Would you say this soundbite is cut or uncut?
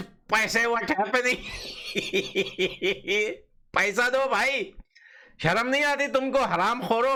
uncut